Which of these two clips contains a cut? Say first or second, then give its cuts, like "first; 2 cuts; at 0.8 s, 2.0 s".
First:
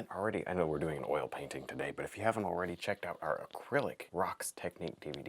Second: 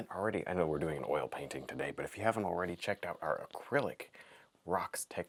first; 1 cut; at 4.0 s